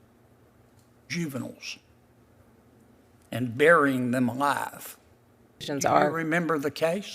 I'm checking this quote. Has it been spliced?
yes; 1 cut; at 5.7 s

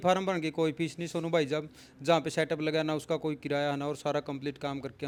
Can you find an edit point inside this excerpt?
no; 0 cuts

